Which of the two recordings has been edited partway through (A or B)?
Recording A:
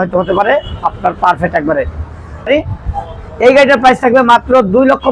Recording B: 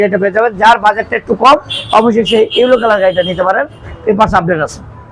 A